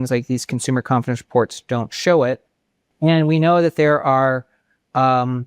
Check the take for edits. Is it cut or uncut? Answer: uncut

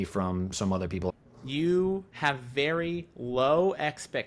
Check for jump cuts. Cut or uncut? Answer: cut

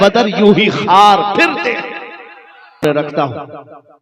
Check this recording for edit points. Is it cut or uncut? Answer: cut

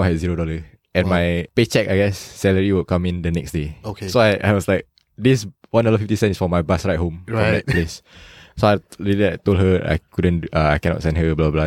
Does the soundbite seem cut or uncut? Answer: cut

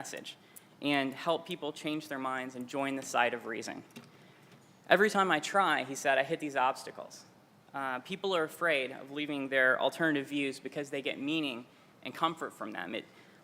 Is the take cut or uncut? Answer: cut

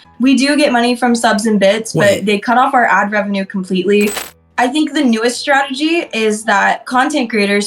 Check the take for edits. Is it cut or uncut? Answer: cut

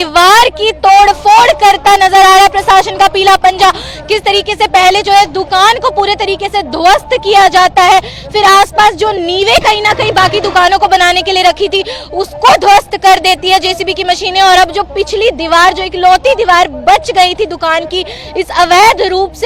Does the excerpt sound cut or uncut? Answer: uncut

